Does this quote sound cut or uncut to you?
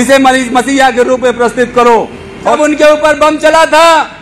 cut